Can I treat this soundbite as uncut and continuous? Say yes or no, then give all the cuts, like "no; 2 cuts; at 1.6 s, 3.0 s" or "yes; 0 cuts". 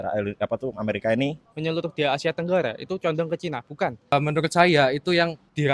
no; 2 cuts; at 1.5 s, 4.1 s